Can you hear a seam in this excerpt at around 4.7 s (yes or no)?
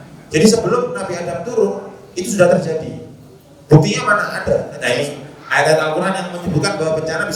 yes